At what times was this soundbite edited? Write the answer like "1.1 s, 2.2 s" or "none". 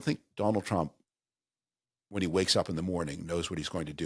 none